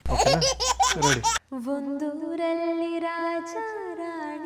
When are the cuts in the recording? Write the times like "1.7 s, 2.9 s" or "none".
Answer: 1.5 s

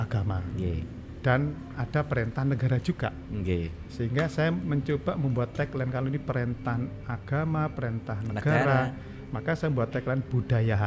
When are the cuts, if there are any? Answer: none

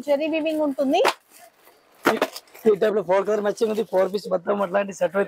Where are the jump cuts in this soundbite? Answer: none

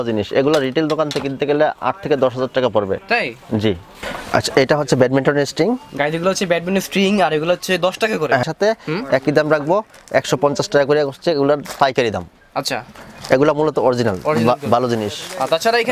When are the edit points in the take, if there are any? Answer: 4.1 s, 8.4 s

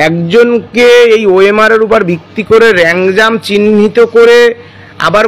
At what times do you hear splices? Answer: none

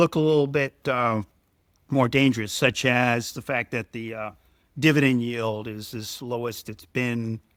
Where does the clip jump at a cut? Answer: none

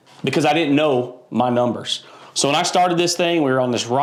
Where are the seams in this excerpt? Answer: none

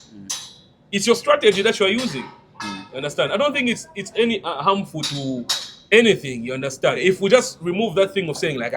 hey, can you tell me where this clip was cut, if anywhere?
7.0 s

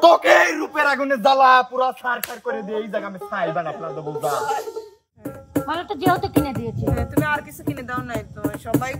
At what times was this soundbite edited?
5.4 s

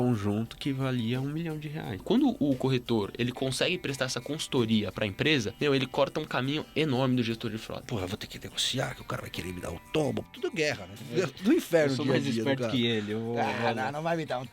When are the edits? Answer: 2.0 s, 5.5 s, 7.9 s, 10.8 s

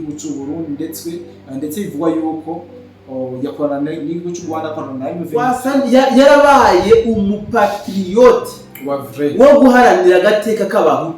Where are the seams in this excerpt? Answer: 5.4 s

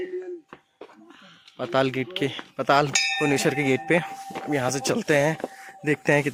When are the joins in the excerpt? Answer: none

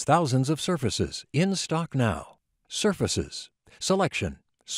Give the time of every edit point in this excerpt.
none

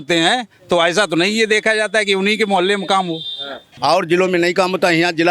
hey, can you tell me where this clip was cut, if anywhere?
3.7 s

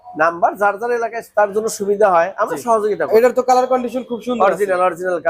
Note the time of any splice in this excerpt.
3.1 s

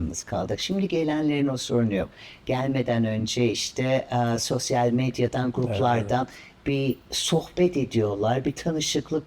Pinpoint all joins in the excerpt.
none

